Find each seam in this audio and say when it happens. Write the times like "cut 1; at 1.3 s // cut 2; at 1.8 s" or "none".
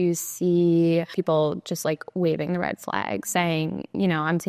cut 1; at 1.2 s